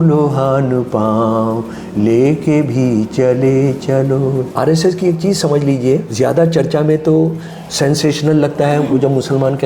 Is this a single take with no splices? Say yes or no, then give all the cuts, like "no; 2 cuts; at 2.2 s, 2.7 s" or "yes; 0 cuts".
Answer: no; 2 cuts; at 4.5 s, 6.1 s